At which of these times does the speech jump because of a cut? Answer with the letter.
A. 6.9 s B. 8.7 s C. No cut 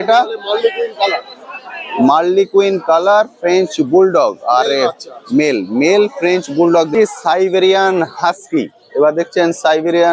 A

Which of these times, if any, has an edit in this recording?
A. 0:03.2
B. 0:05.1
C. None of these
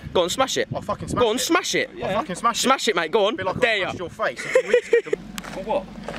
B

